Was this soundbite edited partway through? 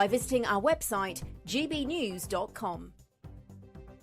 yes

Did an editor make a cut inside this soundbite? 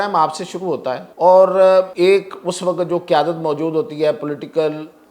yes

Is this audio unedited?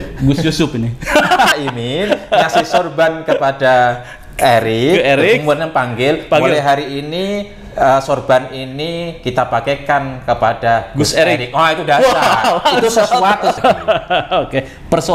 no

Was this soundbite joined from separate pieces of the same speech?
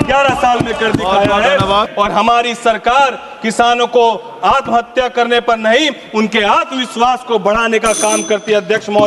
yes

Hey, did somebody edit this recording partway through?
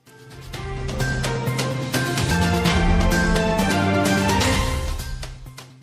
yes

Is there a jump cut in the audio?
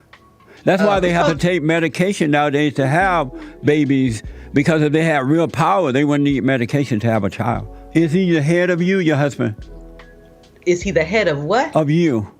yes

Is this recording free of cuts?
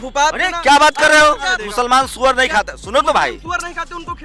no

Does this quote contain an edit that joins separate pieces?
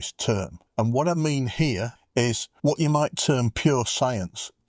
yes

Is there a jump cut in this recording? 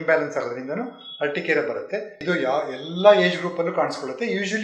yes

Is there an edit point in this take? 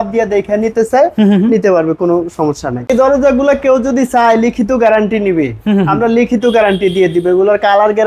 yes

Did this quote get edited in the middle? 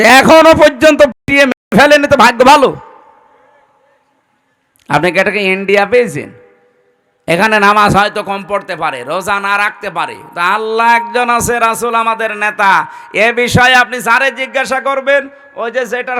no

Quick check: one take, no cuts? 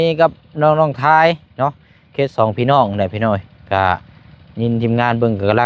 yes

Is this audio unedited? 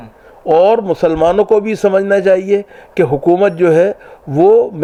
yes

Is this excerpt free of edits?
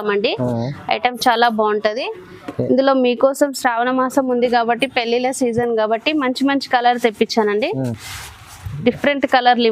yes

